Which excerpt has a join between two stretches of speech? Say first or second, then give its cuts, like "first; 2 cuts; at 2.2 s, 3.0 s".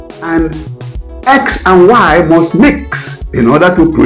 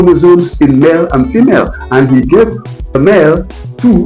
second; 1 cut; at 2.9 s